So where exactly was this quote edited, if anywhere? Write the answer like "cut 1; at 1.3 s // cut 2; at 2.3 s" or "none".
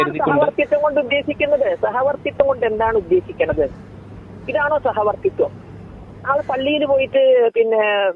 none